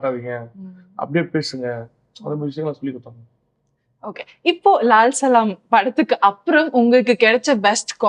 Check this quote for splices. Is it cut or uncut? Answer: uncut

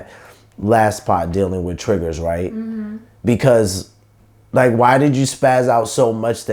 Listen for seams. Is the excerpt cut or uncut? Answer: uncut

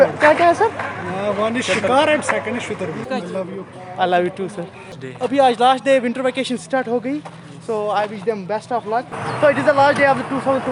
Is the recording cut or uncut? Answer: cut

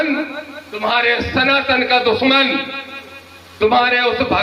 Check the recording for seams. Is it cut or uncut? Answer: uncut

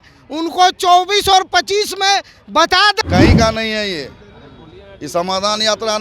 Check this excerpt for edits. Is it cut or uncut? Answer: cut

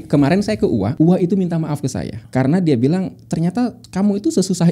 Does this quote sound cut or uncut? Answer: cut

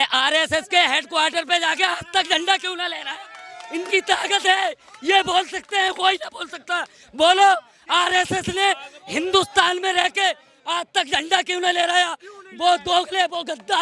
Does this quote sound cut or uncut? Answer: uncut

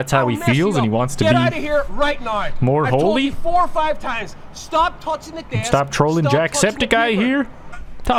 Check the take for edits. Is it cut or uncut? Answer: uncut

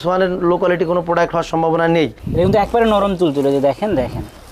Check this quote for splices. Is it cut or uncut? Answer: cut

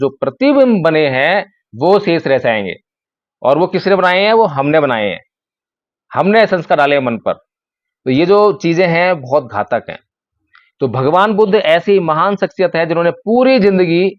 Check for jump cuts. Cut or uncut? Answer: uncut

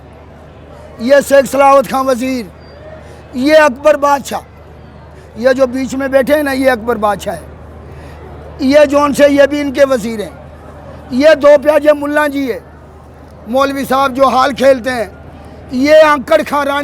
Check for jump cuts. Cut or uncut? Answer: uncut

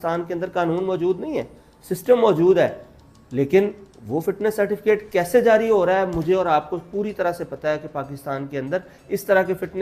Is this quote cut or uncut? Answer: uncut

